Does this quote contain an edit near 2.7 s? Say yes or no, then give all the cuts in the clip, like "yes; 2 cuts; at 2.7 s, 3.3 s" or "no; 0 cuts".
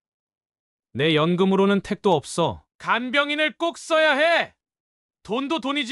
yes; 1 cut; at 2.7 s